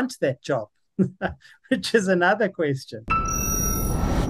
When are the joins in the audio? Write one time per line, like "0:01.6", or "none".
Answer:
0:02.9